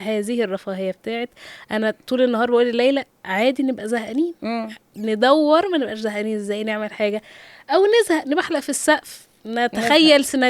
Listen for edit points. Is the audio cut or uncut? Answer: uncut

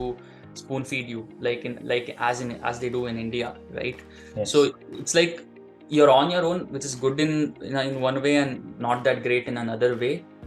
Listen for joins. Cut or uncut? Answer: uncut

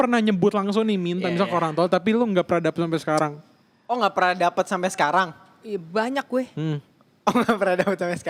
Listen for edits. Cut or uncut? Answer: uncut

